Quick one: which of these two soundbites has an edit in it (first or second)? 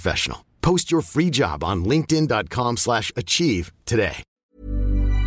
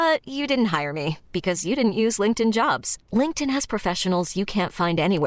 first